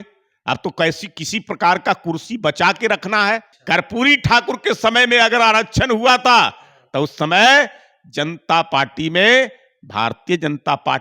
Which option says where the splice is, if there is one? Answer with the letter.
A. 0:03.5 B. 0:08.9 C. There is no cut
A